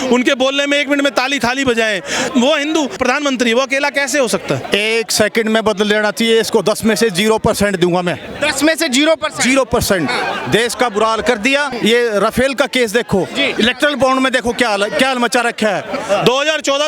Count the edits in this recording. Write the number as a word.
six